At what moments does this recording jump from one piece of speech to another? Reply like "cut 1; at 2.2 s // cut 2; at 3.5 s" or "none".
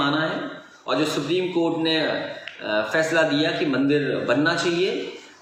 none